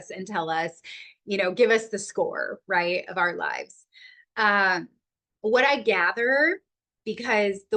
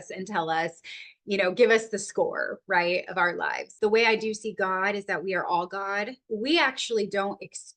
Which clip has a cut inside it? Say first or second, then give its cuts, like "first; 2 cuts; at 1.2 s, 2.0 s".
second; 2 cuts; at 3.7 s, 6.2 s